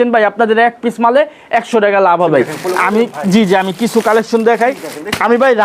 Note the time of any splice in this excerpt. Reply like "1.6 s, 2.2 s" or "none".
2.3 s